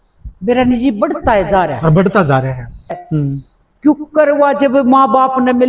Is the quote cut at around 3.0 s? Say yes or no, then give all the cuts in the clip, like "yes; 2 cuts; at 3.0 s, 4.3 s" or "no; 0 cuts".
yes; 1 cut; at 3.0 s